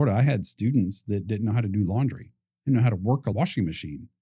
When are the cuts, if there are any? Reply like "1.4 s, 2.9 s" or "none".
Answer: 3.3 s